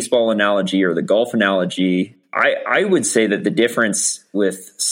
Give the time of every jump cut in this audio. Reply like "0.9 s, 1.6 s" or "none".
2.2 s